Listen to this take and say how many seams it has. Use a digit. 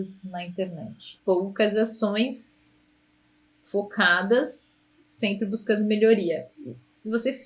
1